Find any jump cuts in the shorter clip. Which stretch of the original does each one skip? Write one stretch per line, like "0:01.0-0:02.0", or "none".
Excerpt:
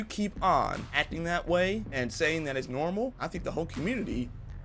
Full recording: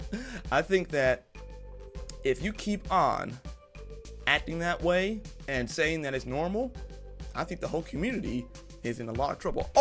0:03.3-0:04.2
0:05.2-0:05.5
0:06.8-0:07.4